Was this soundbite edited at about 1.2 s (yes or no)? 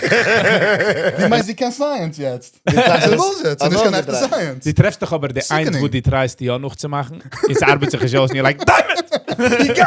yes